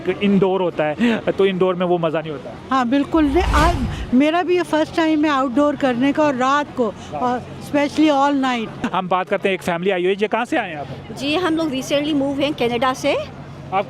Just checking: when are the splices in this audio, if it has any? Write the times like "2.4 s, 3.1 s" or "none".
8.9 s

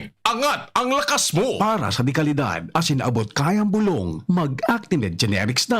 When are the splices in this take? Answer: 1.6 s

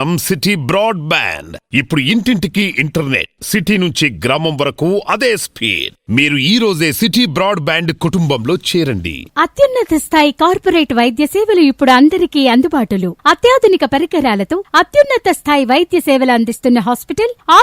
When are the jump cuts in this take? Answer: none

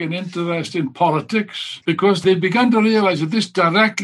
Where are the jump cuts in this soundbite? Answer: 2.0 s

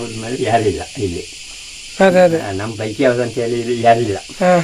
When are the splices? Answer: none

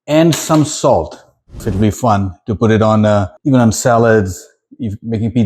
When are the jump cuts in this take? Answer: 1.6 s, 3.3 s

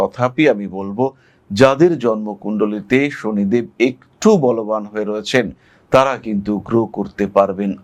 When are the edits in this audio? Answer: none

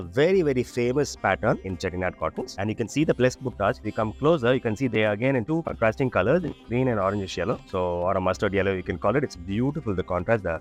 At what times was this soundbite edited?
none

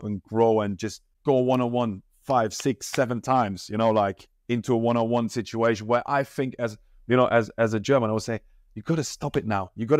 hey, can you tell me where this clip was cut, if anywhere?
1.1 s

